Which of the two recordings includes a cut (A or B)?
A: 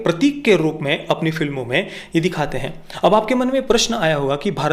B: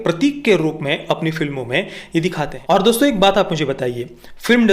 B